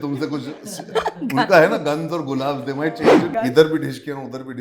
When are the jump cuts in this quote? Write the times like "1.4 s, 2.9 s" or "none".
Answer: 3.3 s